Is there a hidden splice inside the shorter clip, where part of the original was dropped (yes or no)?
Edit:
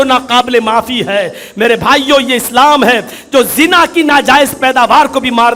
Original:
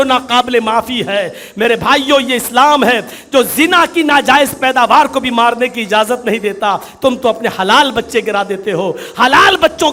no